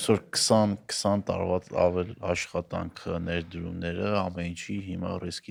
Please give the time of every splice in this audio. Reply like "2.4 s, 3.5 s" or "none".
none